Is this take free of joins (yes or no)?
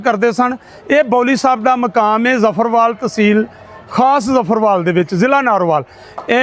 yes